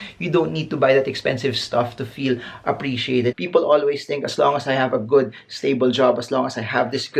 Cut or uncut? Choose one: cut